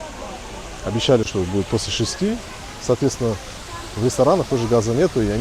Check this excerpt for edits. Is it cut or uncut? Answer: uncut